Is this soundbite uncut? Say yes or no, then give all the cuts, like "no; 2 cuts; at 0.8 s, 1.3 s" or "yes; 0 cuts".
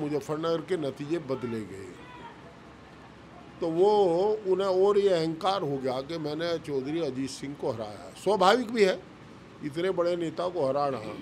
yes; 0 cuts